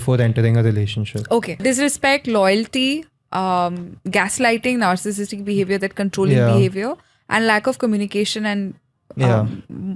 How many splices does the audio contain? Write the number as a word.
one